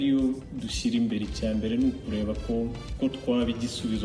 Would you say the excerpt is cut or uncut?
cut